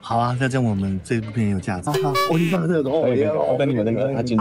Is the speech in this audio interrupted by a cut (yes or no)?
yes